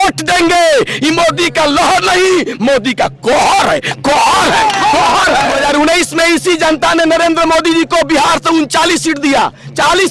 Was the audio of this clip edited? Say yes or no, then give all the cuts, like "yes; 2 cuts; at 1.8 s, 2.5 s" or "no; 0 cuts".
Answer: no; 0 cuts